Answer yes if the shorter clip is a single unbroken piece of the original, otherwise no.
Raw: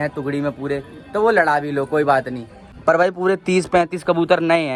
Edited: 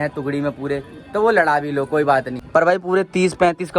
no